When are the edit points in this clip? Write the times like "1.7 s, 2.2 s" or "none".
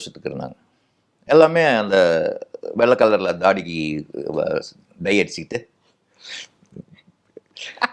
none